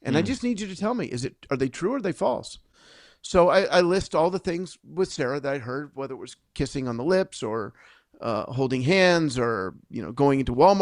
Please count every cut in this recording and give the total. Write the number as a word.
zero